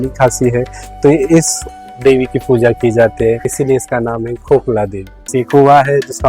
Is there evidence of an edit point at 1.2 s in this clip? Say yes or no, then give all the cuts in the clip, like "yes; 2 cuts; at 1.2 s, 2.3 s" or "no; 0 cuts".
no; 2 cuts; at 3.5 s, 5.2 s